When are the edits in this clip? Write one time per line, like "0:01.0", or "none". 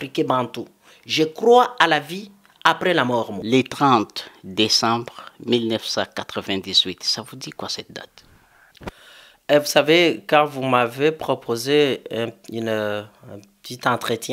0:03.4